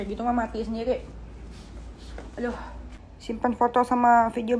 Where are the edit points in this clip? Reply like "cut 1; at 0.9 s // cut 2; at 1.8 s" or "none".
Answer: cut 1; at 3.4 s